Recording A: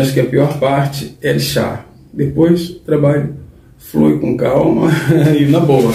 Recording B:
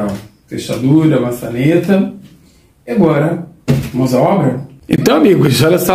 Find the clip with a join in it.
B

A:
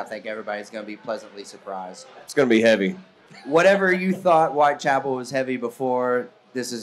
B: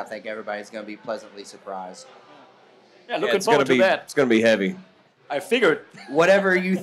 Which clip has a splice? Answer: A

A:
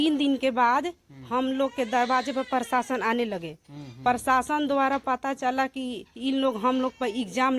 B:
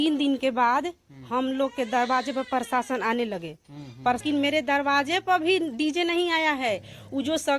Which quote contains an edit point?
B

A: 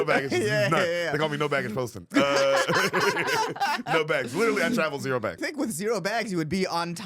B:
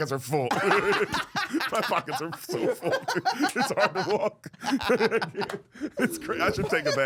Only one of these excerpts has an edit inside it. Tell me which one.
A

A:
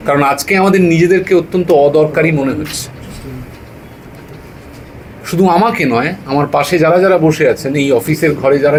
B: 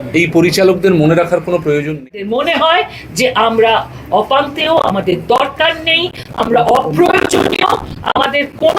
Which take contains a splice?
B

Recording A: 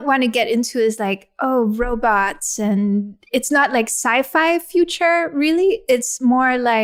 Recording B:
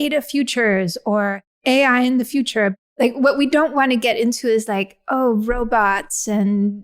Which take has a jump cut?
B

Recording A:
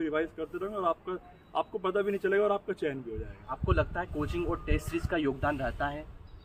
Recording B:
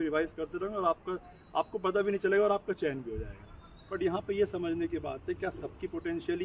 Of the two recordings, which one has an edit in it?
B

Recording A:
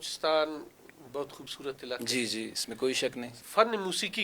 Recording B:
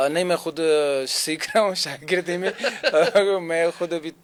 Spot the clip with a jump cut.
A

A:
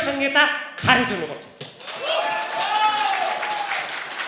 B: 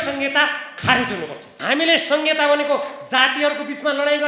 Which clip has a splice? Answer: B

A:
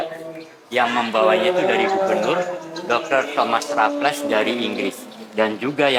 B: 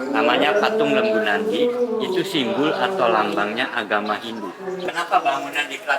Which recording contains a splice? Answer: B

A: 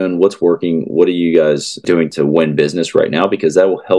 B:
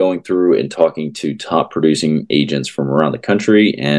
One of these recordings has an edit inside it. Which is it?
A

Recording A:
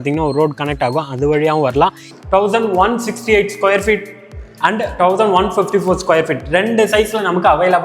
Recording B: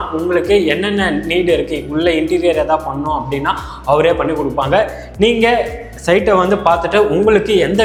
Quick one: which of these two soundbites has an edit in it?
A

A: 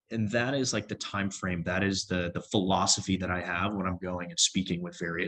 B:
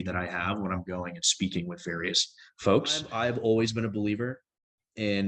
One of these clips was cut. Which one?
B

